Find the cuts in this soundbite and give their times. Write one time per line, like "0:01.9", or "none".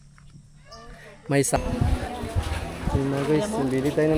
0:01.6